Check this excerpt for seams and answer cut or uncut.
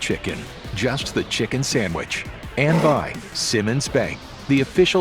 cut